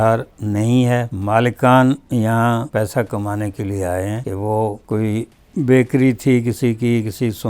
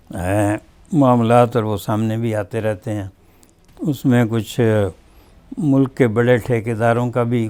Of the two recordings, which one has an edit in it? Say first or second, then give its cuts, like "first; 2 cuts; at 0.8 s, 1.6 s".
first; 3 cuts; at 1.1 s, 2.7 s, 4.4 s